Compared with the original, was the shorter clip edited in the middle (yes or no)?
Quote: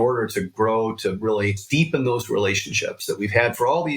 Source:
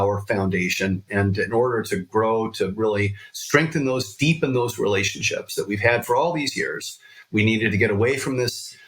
yes